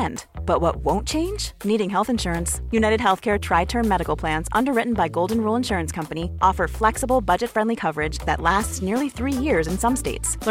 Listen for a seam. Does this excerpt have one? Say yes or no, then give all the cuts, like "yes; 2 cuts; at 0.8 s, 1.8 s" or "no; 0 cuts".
no; 0 cuts